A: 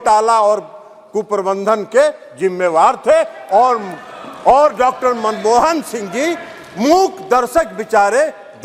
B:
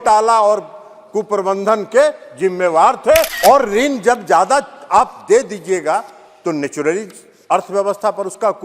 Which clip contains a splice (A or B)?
B